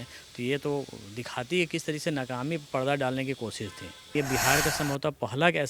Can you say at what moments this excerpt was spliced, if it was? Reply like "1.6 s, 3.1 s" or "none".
4.1 s